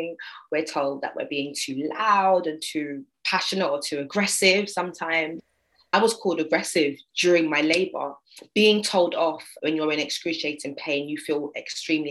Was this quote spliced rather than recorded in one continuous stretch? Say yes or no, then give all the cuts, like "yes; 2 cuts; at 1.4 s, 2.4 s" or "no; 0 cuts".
yes; 2 cuts; at 5.9 s, 9.5 s